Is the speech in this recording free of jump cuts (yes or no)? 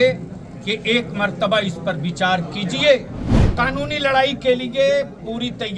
no